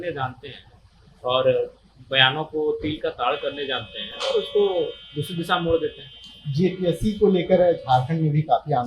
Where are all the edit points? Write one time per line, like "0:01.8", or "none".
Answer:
none